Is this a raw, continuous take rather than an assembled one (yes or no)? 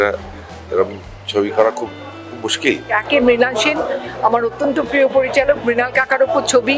no